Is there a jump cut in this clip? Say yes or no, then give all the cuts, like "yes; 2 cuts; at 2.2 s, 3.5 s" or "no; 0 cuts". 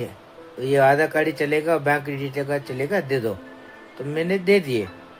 no; 0 cuts